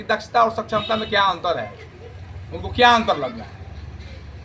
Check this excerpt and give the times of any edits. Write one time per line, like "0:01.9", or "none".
none